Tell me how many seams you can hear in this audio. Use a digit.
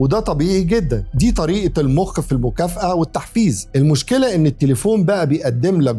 0